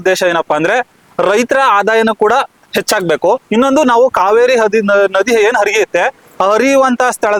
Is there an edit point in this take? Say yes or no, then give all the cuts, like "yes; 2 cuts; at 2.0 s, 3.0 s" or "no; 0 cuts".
no; 0 cuts